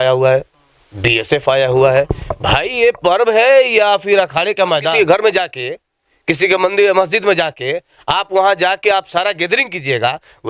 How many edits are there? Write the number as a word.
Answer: one